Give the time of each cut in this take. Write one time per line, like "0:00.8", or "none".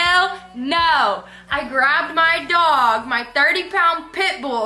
none